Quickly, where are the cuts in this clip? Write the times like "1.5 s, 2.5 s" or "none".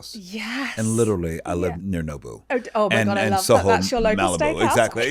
1.8 s